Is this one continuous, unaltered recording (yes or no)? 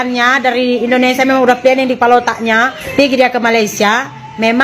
no